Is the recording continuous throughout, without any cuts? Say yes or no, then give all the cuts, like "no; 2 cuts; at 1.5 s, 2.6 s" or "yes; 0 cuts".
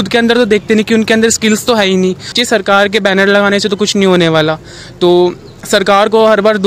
no; 1 cut; at 2.4 s